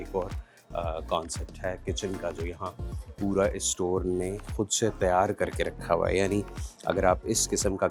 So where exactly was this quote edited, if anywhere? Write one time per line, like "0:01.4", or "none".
none